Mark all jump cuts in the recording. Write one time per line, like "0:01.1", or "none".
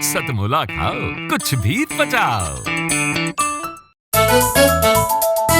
0:04.0